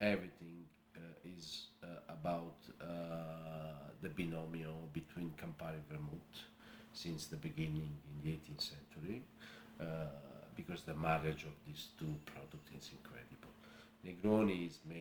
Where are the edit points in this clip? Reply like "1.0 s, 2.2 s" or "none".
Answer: none